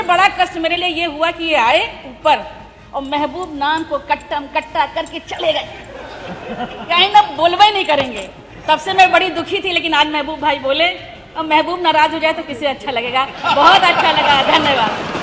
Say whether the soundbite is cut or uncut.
uncut